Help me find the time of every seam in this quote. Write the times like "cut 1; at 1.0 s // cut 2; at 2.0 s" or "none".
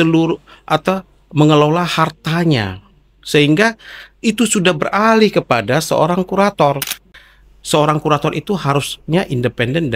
cut 1; at 7.0 s